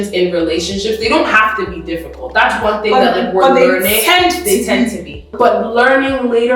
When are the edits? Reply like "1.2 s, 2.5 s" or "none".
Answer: 5.3 s